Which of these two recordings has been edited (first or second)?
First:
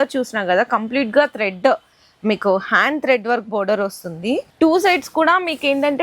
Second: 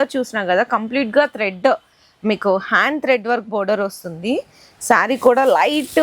first